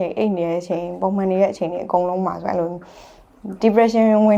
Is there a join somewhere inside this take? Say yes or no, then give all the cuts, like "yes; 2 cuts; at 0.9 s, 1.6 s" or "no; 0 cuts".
no; 0 cuts